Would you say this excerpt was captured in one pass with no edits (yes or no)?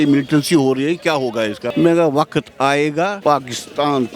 no